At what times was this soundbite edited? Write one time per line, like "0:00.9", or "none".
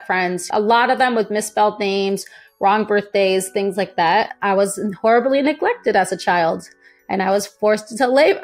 0:04.3